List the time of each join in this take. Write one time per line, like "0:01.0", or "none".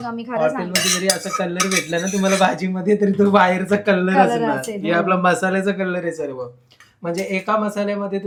none